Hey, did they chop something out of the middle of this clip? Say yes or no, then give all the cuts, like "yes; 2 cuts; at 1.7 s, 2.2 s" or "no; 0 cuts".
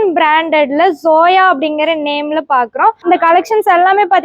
yes; 1 cut; at 3.0 s